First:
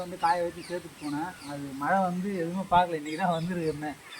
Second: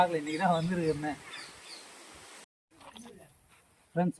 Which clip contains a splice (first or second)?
second